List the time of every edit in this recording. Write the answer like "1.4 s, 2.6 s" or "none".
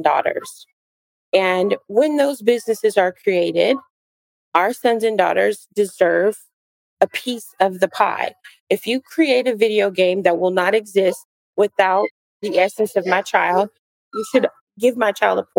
14.6 s